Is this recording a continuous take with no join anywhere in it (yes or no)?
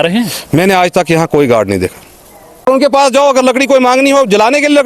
no